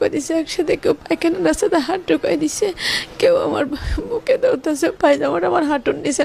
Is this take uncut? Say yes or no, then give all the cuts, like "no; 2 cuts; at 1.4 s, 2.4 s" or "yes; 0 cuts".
no; 1 cut; at 4.9 s